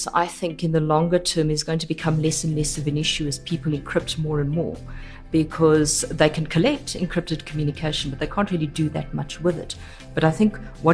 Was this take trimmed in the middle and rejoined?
no; 0 cuts

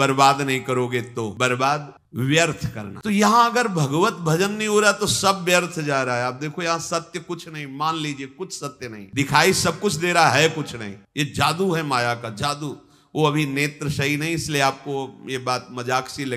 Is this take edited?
no; 0 cuts

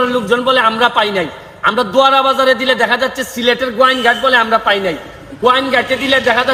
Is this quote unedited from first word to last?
yes; 0 cuts

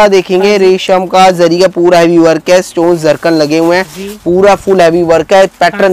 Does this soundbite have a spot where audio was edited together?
no; 0 cuts

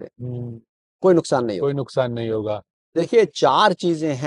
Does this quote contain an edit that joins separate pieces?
yes; 1 cut; at 2.7 s

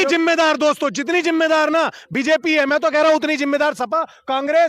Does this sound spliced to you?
no; 0 cuts

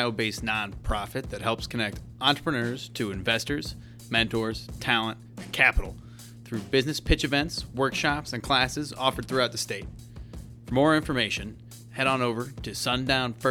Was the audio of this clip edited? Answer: no; 0 cuts

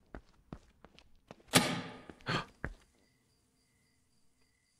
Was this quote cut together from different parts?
no; 0 cuts

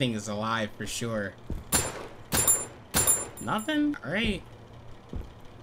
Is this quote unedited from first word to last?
no; 1 cut; at 1.5 s

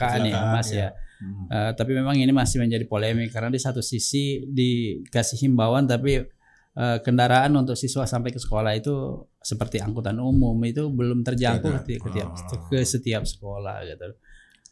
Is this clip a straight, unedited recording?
yes; 0 cuts

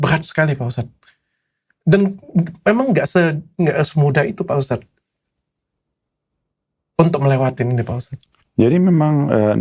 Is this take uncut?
yes; 0 cuts

